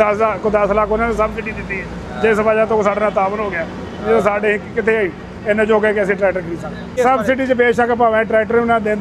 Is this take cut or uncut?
cut